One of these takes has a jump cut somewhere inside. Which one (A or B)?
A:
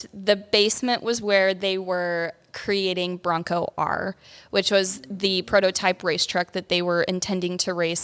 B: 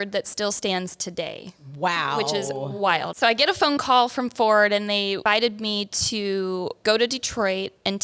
B